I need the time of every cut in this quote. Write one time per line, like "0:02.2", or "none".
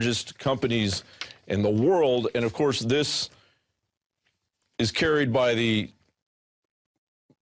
0:05.1